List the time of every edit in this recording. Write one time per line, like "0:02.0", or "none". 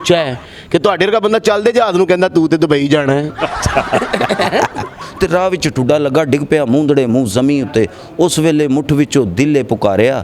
0:05.0